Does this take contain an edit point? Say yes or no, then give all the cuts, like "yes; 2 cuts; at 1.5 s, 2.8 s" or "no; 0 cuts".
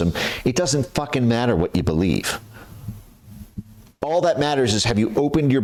no; 0 cuts